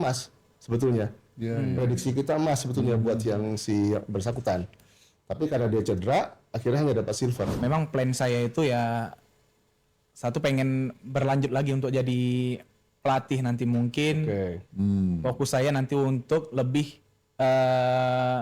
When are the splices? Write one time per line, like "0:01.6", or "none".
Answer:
0:07.5